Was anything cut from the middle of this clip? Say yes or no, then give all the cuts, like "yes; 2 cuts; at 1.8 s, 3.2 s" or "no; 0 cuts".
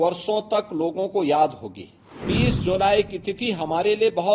yes; 1 cut; at 2.3 s